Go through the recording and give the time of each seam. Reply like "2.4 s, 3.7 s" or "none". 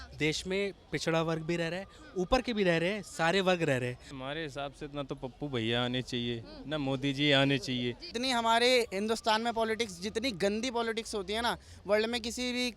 4.1 s, 8.1 s